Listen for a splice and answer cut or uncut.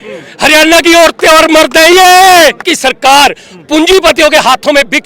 cut